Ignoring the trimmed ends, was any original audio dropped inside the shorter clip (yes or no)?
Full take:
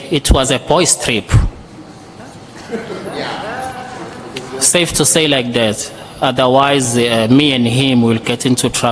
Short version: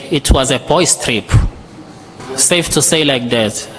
yes